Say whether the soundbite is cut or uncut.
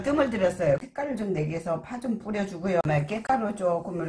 cut